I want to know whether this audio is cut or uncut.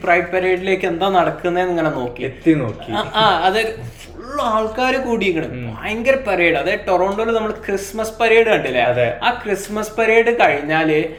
uncut